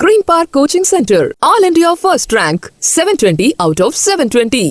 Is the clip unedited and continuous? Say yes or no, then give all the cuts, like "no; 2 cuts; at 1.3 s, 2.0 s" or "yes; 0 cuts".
yes; 0 cuts